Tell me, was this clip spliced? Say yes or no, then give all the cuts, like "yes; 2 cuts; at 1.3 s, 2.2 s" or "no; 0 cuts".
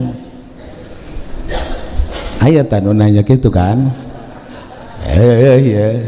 no; 0 cuts